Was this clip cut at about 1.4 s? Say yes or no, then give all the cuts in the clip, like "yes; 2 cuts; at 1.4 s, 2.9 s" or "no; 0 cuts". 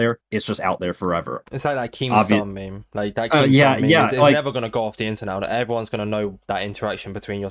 yes; 1 cut; at 1.4 s